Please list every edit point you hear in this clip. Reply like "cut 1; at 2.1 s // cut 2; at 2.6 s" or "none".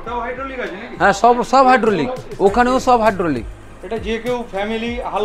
none